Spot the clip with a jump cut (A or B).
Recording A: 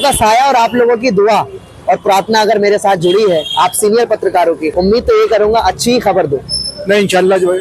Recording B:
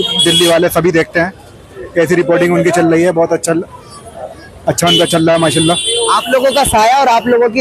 A